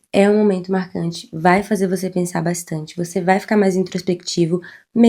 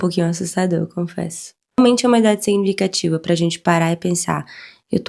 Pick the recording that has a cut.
second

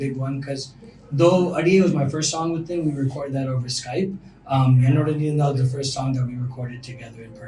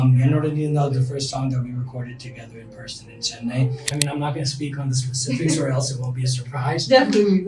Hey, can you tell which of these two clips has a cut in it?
second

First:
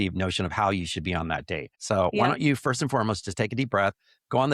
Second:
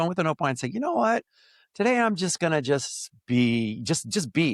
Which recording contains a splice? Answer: first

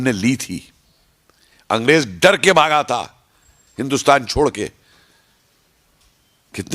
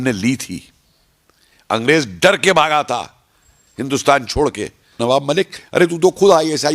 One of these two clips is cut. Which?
second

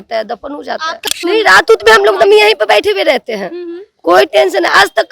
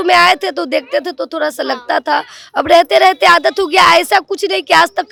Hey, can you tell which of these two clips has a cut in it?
first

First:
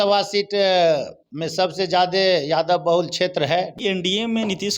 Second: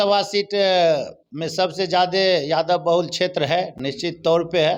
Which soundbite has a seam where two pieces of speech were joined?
first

